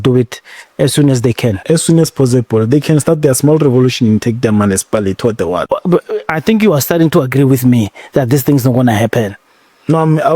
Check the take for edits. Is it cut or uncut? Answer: cut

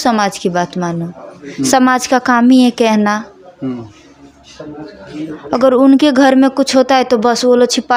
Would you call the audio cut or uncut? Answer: uncut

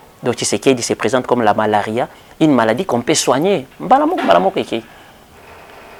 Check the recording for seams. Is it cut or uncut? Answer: uncut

